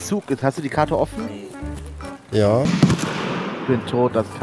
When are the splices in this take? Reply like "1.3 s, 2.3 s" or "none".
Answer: 2.7 s